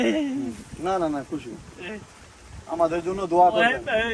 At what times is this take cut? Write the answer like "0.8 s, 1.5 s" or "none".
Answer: none